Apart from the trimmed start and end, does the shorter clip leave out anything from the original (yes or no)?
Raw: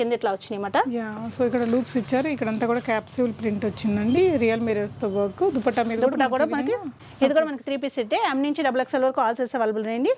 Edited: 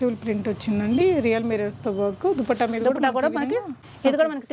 no